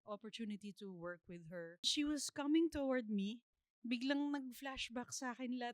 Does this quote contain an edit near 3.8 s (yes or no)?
no